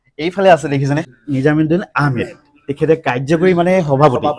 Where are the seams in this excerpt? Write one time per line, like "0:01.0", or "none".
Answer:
0:01.1

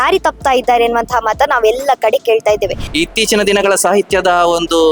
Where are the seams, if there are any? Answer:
0:02.8

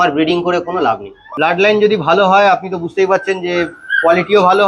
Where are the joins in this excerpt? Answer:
0:01.3

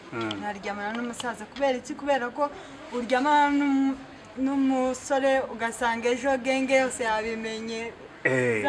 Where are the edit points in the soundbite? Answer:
none

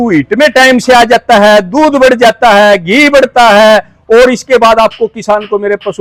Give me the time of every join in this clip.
none

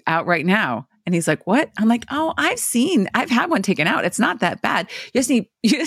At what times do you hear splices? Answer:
none

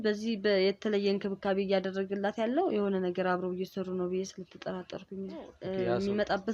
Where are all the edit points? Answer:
0:05.6

